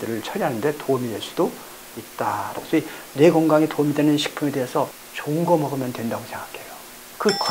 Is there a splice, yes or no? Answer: yes